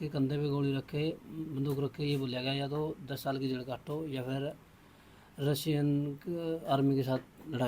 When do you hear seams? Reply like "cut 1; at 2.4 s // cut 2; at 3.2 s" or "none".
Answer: none